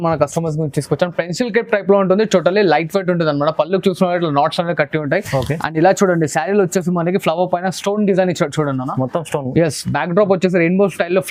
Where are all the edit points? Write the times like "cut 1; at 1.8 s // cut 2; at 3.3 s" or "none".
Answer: none